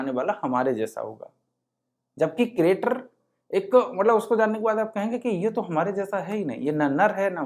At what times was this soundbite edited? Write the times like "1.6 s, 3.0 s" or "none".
none